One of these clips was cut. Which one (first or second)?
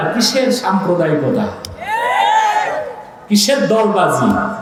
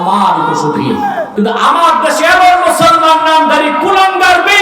second